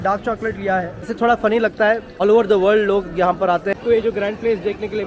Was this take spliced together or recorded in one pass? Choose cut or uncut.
cut